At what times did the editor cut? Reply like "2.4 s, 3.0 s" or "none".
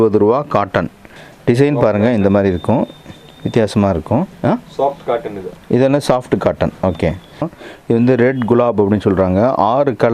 1.0 s, 7.6 s